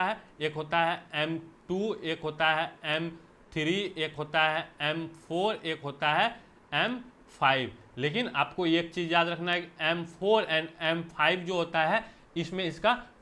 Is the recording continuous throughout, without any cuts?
yes; 0 cuts

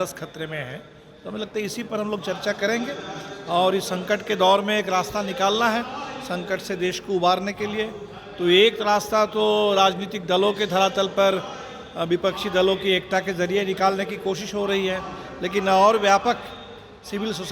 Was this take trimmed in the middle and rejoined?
no; 0 cuts

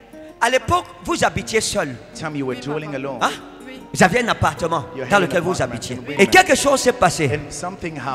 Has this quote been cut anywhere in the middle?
yes; 1 cut; at 6.1 s

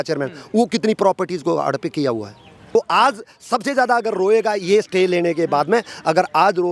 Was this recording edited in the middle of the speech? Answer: yes; 1 cut; at 2.8 s

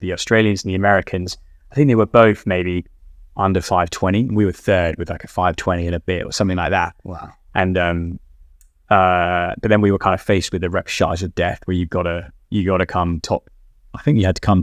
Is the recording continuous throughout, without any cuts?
yes; 0 cuts

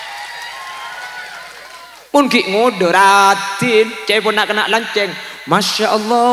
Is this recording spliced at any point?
yes; 1 cut; at 2.0 s

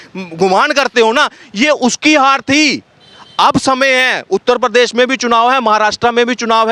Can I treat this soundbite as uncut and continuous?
yes; 0 cuts

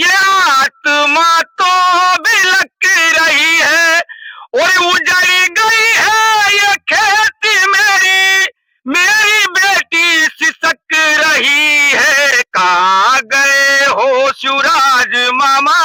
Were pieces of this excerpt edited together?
no; 0 cuts

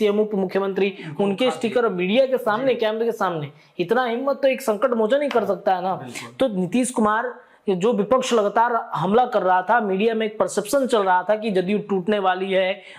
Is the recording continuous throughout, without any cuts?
yes; 0 cuts

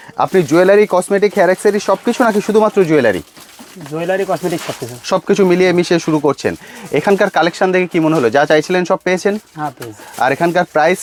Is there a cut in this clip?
no; 0 cuts

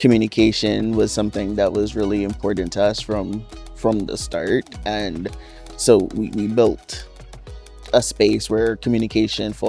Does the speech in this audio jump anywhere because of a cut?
no; 0 cuts

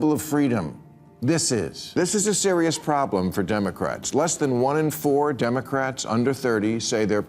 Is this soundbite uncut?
no; 1 cut; at 1.8 s

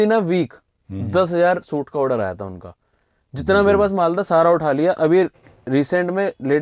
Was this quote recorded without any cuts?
yes; 0 cuts

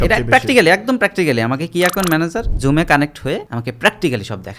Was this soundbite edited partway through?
yes; 2 cuts; at 2.5 s, 3.5 s

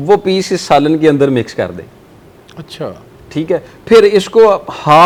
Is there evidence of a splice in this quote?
no; 0 cuts

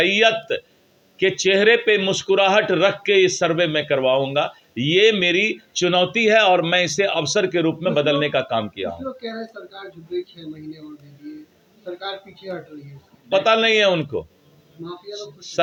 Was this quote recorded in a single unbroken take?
yes; 0 cuts

